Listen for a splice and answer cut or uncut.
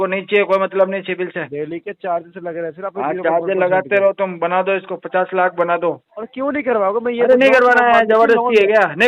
cut